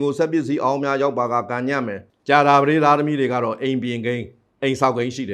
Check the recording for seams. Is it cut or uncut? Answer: cut